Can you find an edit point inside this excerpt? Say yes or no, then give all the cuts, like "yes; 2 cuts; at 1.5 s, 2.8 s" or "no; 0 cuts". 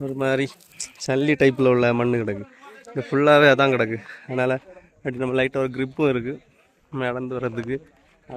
no; 0 cuts